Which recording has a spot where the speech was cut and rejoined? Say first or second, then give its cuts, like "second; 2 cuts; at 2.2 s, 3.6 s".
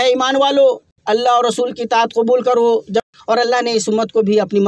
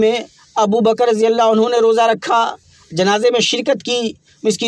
first; 2 cuts; at 0.9 s, 3.0 s